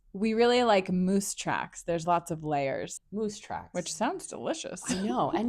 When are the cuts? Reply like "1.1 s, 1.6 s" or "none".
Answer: 3.0 s